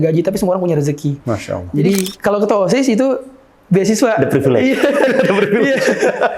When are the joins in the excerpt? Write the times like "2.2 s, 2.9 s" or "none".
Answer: 2.1 s